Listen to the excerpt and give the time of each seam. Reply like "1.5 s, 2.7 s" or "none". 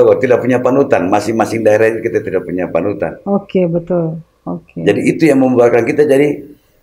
none